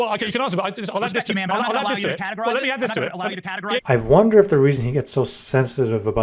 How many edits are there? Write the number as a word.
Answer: one